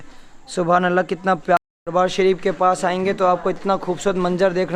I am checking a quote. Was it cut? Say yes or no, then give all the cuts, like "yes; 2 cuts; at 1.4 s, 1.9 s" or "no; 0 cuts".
yes; 1 cut; at 1.6 s